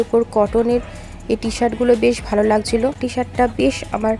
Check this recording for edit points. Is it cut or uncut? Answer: cut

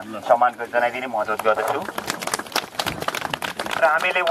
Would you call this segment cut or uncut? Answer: uncut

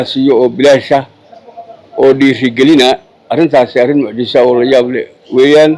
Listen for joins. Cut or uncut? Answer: uncut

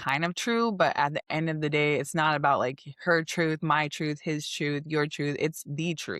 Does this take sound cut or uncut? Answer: uncut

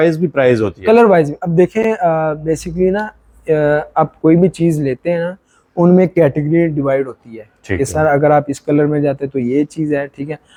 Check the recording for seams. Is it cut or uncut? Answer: uncut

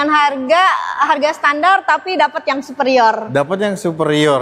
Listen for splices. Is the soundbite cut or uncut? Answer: uncut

